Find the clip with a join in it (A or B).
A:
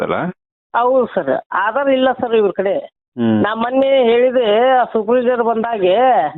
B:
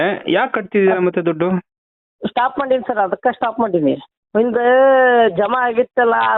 B